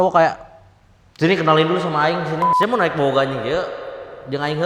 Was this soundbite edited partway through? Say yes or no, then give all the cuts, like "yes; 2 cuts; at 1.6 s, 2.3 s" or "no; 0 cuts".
yes; 1 cut; at 2.4 s